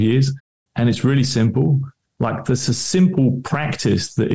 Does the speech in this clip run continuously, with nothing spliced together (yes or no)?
no